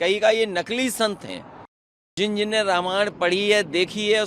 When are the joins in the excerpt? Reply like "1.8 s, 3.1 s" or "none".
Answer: 2.1 s

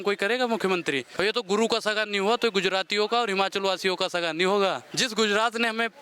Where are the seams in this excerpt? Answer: 1.1 s, 4.9 s

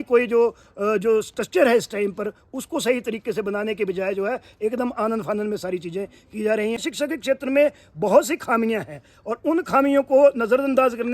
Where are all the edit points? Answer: 6.8 s

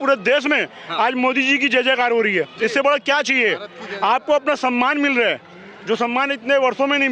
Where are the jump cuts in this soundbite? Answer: none

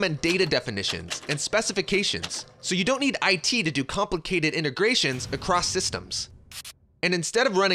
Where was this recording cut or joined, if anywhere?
none

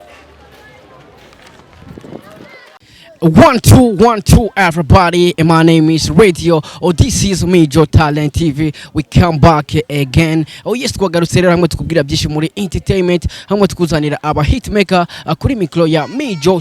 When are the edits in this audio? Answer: none

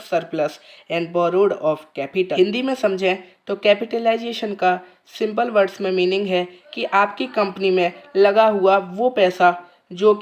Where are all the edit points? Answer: 2.4 s

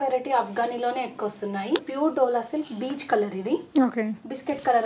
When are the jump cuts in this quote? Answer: 1.9 s

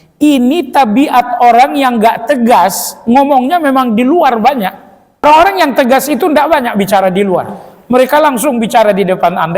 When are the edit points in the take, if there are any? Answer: 5.2 s

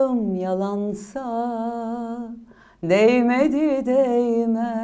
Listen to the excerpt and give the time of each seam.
none

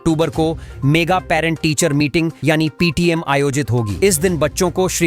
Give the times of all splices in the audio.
none

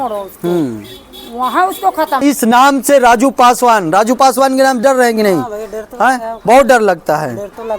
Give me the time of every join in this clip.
2.2 s

